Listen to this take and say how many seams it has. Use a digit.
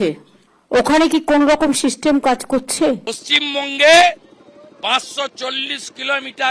1